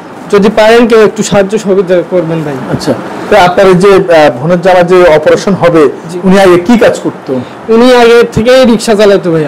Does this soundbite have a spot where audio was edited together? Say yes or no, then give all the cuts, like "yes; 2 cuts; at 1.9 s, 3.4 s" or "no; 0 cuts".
no; 0 cuts